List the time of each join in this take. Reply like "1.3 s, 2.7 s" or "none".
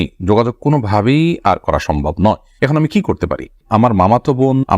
3.6 s